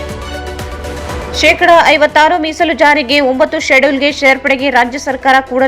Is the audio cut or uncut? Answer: uncut